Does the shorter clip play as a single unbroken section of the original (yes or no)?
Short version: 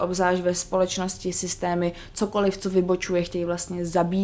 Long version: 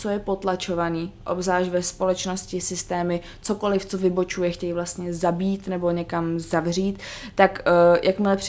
yes